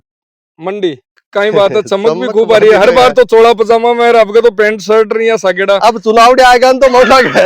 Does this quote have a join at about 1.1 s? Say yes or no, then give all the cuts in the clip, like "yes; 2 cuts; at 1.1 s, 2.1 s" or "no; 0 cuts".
yes; 1 cut; at 1.1 s